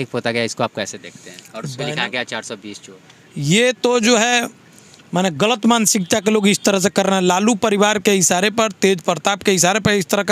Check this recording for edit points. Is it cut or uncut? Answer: uncut